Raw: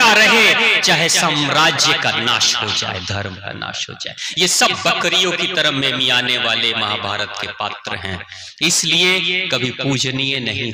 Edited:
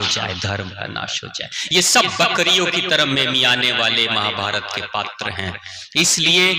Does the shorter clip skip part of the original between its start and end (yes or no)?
no